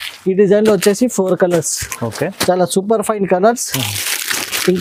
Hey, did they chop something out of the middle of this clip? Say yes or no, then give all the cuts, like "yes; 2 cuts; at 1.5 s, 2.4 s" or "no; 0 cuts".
no; 0 cuts